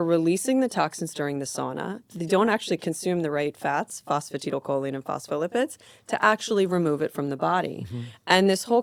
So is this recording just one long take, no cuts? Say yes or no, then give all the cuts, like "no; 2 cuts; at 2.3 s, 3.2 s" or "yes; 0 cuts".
yes; 0 cuts